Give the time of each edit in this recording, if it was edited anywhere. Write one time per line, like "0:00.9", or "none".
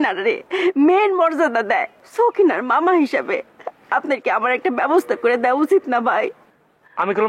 0:02.0